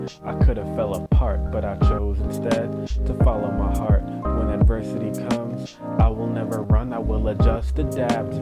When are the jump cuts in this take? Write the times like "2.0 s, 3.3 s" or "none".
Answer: none